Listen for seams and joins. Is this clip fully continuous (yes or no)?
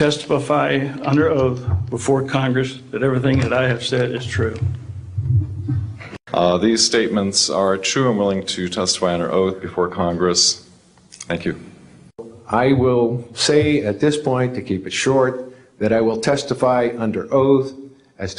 no